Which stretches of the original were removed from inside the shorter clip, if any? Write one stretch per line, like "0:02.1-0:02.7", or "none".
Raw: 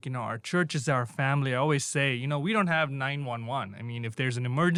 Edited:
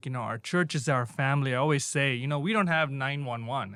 none